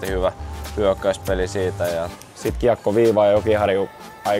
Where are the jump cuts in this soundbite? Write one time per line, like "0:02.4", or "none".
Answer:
0:02.2